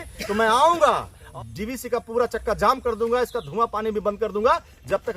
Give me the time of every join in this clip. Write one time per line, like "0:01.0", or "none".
0:01.2